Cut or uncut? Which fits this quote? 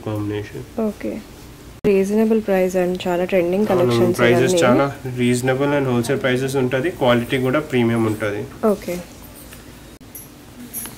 cut